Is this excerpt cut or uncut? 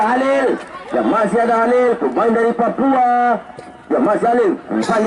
uncut